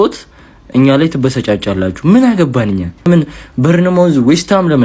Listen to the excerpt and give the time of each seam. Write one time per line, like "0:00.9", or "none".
0:03.1